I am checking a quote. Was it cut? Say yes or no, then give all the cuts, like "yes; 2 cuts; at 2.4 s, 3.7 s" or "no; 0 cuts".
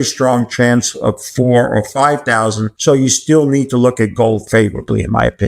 yes; 1 cut; at 2.7 s